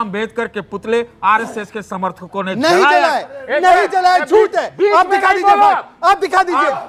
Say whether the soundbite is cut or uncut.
uncut